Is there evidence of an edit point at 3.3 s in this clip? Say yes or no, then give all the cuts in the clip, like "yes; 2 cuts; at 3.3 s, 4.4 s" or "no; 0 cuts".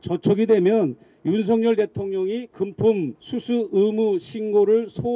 yes; 1 cut; at 3.3 s